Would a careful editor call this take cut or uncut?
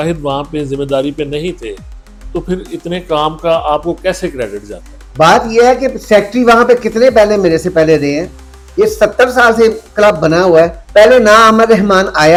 uncut